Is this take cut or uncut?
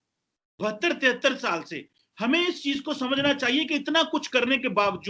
uncut